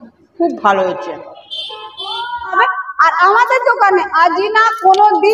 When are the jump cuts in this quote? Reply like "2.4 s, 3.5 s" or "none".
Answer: 2.5 s